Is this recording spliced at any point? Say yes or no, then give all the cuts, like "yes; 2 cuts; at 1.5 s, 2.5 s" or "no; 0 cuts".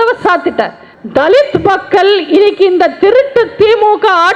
yes; 1 cut; at 0.9 s